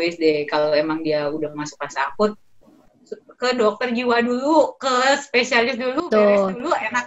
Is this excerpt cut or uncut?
uncut